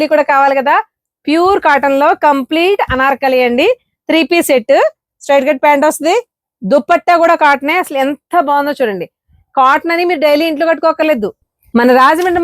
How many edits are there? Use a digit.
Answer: 1